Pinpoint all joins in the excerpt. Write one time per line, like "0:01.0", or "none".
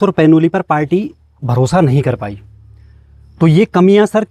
none